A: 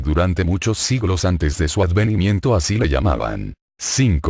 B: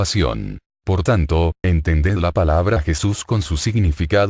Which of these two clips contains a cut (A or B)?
B